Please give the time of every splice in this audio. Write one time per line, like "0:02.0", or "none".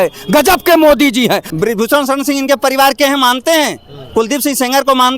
0:01.4